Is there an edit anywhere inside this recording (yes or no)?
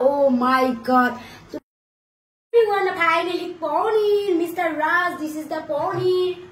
no